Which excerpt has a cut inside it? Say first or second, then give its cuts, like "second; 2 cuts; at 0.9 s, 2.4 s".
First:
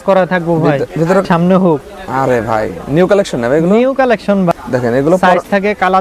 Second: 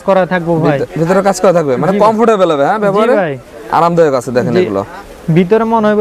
first; 2 cuts; at 1.2 s, 4.5 s